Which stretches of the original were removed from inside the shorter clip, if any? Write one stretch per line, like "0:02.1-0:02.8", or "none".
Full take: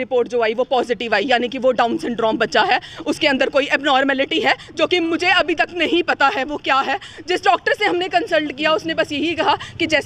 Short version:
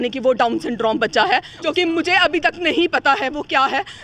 0:02.9-0:04.7